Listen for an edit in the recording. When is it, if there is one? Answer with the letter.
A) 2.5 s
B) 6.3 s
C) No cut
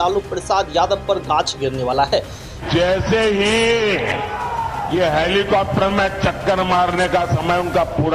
A